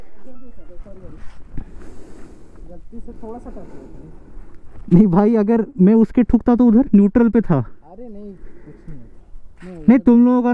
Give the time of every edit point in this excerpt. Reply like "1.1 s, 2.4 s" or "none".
none